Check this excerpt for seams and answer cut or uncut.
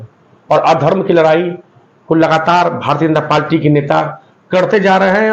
uncut